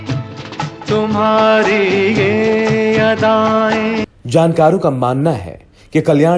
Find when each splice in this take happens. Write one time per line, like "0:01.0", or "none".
0:03.9